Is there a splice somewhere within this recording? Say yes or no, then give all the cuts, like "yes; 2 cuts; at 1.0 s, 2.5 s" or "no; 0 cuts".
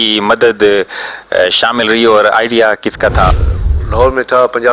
yes; 1 cut; at 3.3 s